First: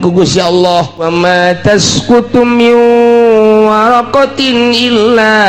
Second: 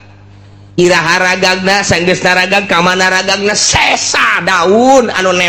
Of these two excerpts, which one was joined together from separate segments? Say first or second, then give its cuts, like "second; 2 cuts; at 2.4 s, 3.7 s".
first; 1 cut; at 1.0 s